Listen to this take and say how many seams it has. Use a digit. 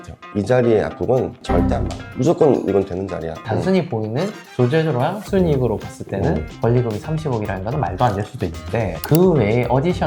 2